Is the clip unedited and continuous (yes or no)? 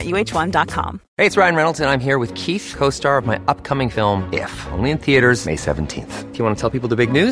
no